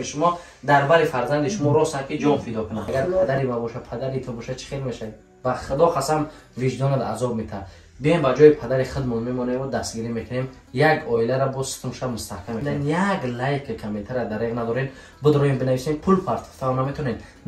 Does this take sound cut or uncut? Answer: cut